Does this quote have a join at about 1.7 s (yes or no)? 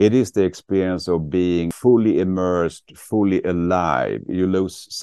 yes